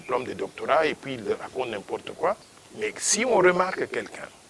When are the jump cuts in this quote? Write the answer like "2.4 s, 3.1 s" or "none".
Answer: 2.5 s